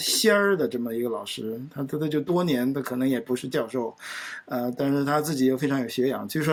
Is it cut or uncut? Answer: uncut